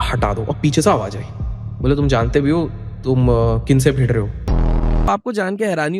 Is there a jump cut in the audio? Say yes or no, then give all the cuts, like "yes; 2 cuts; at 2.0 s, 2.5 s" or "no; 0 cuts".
yes; 1 cut; at 4.7 s